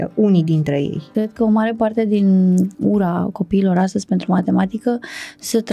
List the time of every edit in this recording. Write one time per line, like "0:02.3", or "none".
0:01.1
0:02.7